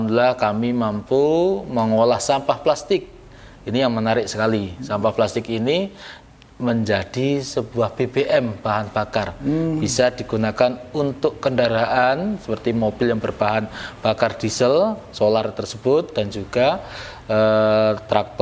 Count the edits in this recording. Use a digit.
0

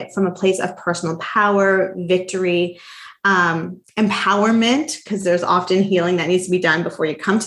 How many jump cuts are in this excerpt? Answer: 0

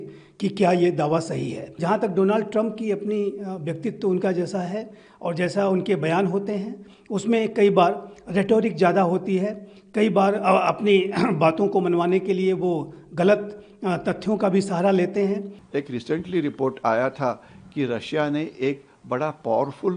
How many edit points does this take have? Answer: 2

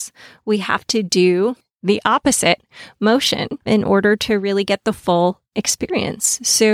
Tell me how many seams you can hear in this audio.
2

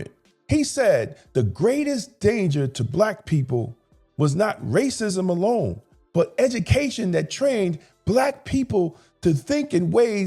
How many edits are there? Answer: 0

